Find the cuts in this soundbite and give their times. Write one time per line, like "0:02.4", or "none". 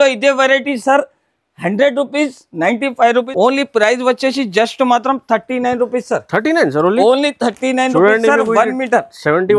0:03.3